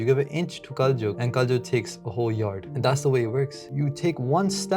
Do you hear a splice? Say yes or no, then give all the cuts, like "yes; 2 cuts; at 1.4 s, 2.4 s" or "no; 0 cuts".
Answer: yes; 3 cuts; at 1.2 s, 2.7 s, 3.7 s